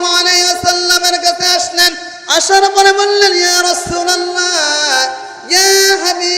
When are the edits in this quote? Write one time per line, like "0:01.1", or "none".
0:02.1